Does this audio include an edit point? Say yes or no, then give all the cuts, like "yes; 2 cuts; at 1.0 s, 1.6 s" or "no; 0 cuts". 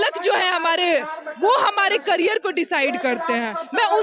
no; 0 cuts